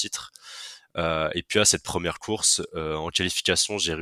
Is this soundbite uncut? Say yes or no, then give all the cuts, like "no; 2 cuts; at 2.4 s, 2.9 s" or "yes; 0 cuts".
yes; 0 cuts